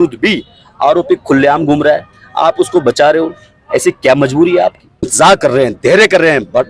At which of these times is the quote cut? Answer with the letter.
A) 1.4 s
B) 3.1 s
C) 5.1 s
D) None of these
C